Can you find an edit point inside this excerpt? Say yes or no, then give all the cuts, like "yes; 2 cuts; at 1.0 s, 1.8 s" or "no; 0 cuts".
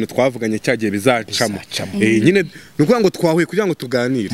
no; 0 cuts